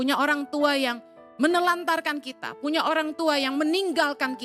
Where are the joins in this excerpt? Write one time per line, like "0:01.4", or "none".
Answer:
none